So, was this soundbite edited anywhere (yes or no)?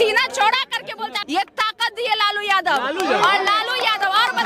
yes